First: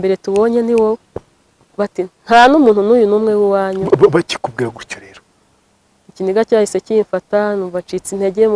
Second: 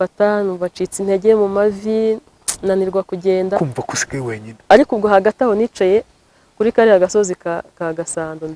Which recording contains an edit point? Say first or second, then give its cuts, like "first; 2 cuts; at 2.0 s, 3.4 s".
second; 1 cut; at 4.6 s